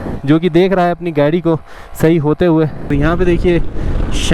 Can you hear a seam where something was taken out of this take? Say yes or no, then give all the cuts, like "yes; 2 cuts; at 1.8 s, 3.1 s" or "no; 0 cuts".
yes; 1 cut; at 2.9 s